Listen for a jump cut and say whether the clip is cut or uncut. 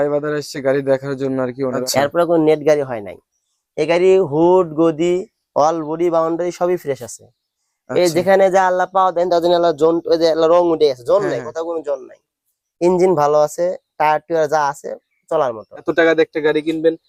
cut